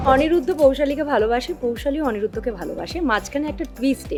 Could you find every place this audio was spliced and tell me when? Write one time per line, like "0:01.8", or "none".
none